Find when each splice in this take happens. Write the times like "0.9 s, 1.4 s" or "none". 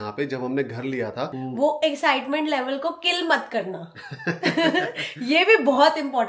1.4 s